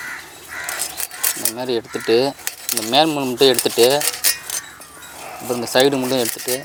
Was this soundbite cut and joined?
no; 0 cuts

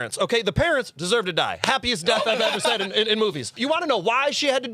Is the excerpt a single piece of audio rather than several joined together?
no; 1 cut; at 3.5 s

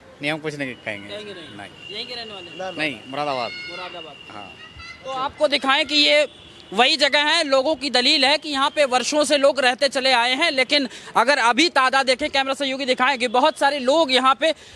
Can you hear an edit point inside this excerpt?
no; 0 cuts

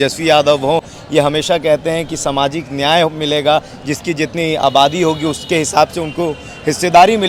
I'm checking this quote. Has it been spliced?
no; 0 cuts

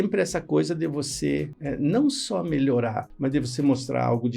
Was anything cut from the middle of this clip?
yes; 2 cuts; at 1.6 s, 3.1 s

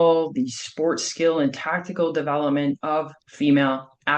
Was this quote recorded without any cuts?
no; 1 cut; at 3.2 s

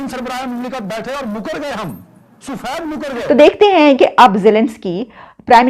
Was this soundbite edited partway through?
yes; 1 cut; at 3.1 s

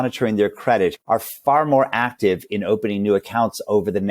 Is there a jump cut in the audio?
yes; 1 cut; at 1.0 s

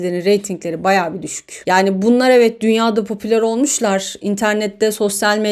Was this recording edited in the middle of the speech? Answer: no; 0 cuts

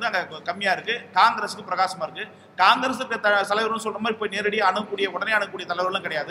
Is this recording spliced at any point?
no; 0 cuts

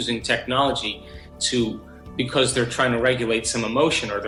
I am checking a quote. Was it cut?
no; 0 cuts

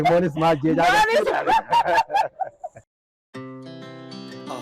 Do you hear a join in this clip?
yes; 1 cut; at 2.7 s

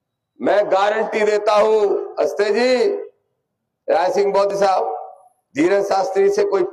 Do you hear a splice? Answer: no; 0 cuts

